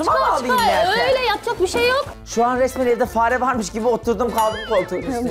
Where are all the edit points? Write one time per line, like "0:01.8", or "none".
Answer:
0:02.1